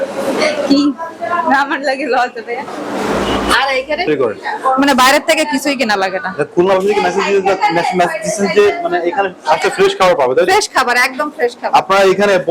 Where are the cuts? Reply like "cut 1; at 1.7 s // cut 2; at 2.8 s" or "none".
cut 1; at 4.1 s